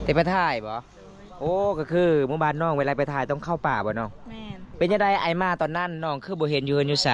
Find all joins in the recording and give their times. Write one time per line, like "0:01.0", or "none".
0:04.6